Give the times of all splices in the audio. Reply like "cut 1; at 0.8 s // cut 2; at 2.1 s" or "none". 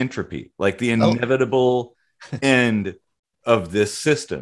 none